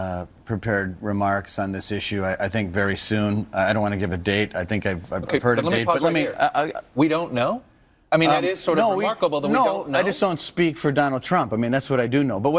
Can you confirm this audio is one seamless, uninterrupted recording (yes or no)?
yes